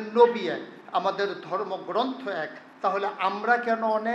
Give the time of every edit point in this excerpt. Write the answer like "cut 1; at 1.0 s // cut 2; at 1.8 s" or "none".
none